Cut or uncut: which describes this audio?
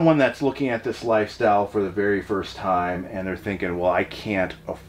uncut